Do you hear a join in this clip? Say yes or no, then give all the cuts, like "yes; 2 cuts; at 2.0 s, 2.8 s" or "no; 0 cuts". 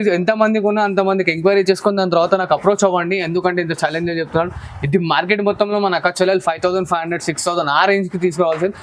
no; 0 cuts